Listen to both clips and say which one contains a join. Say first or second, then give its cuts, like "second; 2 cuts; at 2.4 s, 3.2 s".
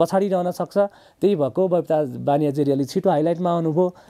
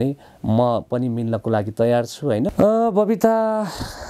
second; 1 cut; at 2.5 s